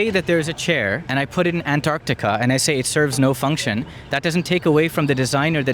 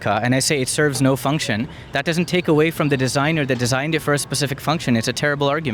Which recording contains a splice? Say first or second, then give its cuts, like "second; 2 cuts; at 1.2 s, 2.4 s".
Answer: first; 1 cut; at 1.0 s